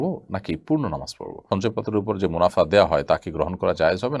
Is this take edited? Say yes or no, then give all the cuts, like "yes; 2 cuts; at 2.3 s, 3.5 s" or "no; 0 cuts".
yes; 1 cut; at 1.4 s